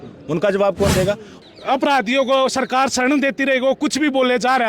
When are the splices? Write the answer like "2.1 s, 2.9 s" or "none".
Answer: 1.3 s